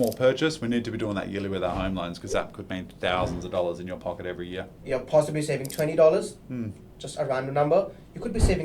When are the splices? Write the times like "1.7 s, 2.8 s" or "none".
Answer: 4.7 s